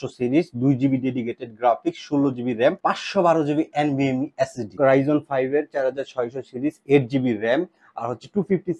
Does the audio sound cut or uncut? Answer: cut